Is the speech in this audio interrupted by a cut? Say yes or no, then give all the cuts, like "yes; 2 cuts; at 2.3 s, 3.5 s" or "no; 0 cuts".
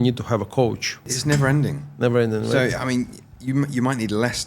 yes; 1 cut; at 1.0 s